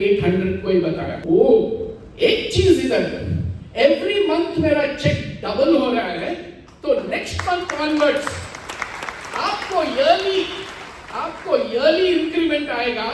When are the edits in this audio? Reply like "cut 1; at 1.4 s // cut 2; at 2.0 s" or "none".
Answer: cut 1; at 1.1 s